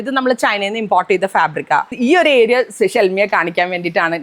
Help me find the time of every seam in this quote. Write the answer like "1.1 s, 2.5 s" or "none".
2.0 s